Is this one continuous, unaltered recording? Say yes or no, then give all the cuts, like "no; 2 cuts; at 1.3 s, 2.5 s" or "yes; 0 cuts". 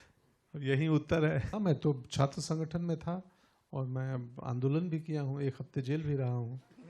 no; 1 cut; at 1.5 s